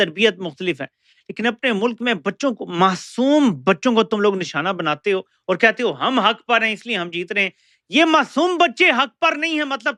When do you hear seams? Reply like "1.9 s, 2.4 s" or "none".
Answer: none